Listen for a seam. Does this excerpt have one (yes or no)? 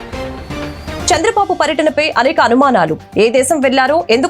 yes